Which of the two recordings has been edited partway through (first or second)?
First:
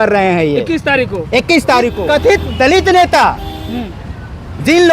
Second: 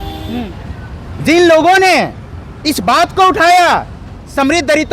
first